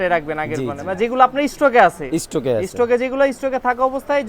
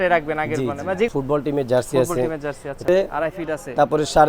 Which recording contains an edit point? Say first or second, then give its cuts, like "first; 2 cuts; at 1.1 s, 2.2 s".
second; 2 cuts; at 1.1 s, 2.9 s